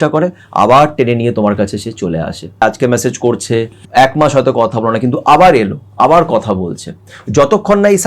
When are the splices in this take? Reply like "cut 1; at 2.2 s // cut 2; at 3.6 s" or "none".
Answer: cut 1; at 2.6 s // cut 2; at 3.8 s